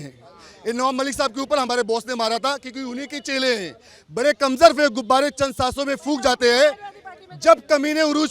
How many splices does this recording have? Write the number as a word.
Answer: zero